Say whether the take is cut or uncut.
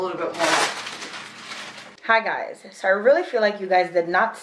cut